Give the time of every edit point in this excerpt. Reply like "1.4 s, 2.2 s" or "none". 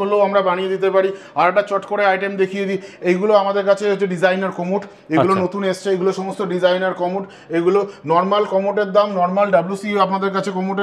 none